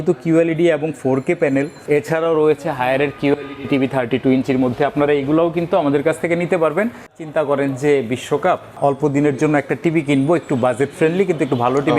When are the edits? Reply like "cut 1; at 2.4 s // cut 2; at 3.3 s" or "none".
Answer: cut 1; at 1.8 s // cut 2; at 7.2 s // cut 3; at 8.8 s